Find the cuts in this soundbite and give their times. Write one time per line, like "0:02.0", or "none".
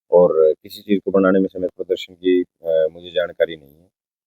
0:01.8